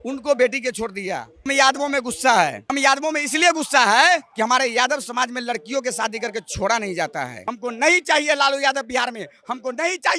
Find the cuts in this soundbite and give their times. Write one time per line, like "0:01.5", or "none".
0:01.5
0:02.7
0:04.3
0:07.4